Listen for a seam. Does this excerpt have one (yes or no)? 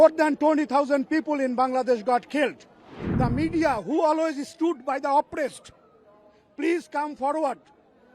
yes